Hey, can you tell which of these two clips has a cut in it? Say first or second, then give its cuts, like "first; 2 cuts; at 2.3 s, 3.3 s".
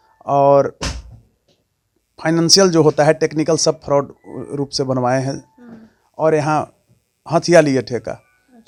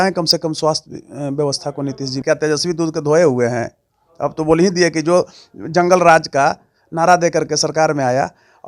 second; 1 cut; at 2.2 s